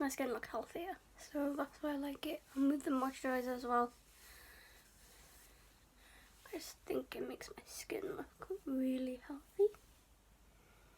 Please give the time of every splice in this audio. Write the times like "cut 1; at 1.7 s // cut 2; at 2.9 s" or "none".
none

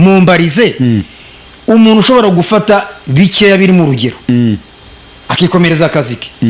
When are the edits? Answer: none

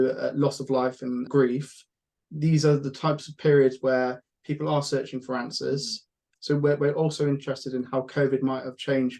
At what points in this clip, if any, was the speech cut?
cut 1; at 1.3 s // cut 2; at 6.3 s

